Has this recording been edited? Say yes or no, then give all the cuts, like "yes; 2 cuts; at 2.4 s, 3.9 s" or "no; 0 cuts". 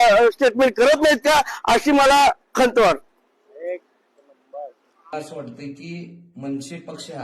yes; 1 cut; at 5.1 s